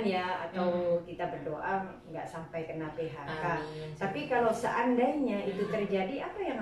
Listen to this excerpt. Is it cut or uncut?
uncut